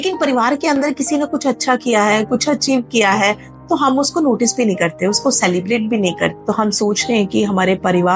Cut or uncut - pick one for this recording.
cut